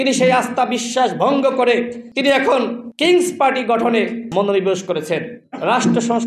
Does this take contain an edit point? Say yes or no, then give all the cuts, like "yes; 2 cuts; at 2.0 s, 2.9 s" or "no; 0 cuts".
yes; 1 cut; at 5.3 s